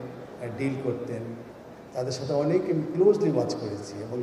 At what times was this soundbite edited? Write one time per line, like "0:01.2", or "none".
none